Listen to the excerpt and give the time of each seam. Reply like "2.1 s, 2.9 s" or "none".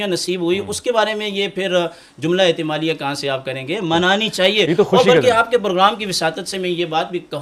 none